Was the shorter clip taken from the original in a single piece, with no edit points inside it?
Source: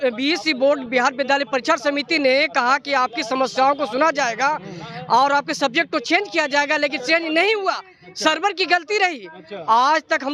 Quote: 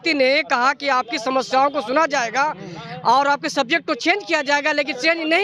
yes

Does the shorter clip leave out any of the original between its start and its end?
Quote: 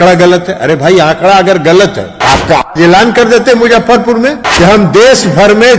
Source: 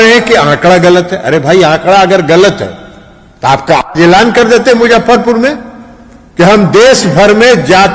yes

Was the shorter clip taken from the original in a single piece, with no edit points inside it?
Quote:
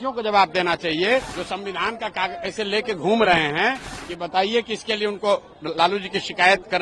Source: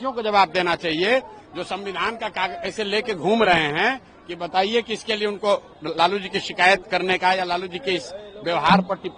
no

